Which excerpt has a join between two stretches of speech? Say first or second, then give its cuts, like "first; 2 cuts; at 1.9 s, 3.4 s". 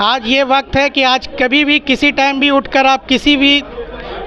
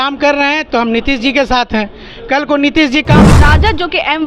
second; 1 cut; at 3.3 s